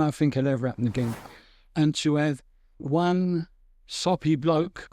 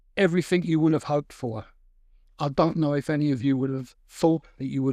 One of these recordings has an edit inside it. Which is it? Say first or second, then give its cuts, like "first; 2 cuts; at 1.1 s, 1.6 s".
first; 1 cut; at 1.2 s